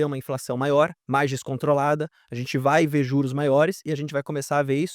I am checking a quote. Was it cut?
yes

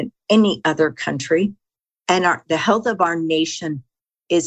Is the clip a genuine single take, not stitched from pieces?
no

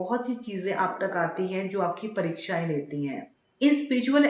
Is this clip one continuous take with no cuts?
yes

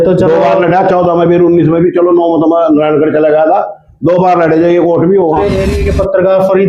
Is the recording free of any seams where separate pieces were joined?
no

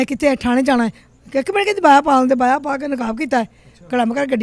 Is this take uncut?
yes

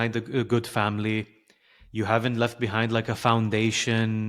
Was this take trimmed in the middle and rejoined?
no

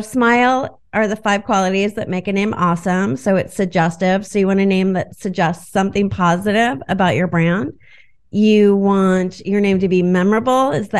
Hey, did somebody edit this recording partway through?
no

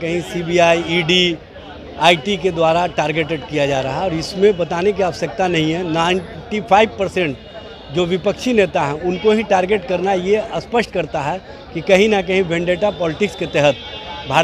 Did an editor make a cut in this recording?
no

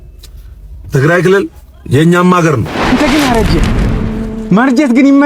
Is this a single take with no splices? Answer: no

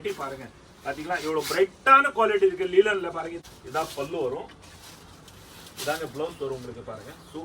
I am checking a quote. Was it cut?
yes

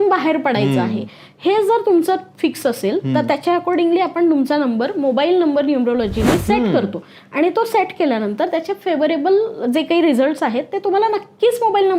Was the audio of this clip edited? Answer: no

